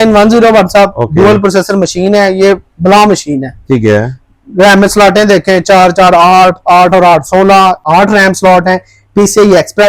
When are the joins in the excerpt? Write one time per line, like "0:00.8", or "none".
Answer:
0:07.8